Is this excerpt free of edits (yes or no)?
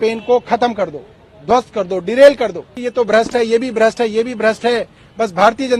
no